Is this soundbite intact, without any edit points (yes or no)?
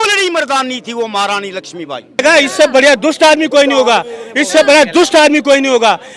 no